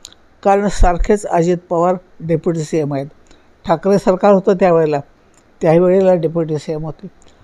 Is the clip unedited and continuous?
yes; 0 cuts

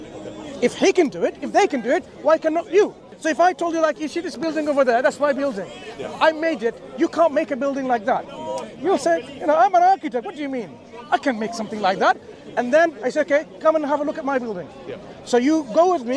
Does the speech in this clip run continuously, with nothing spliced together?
no; 1 cut; at 3.1 s

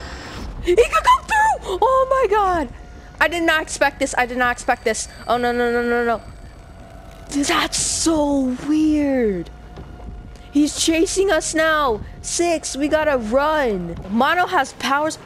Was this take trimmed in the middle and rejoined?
yes; 1 cut; at 14.1 s

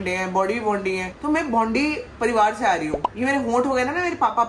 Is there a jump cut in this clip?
no; 0 cuts

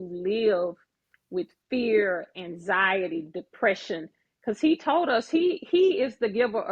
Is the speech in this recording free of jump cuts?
yes; 0 cuts

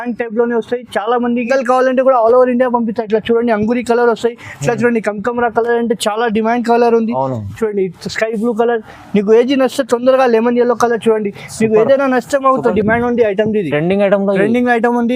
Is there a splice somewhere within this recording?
yes; 2 cuts; at 1.5 s, 12.7 s

